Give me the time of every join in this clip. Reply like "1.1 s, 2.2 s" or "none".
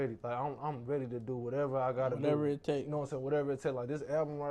none